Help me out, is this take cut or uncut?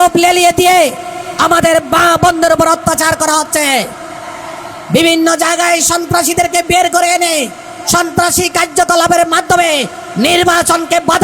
uncut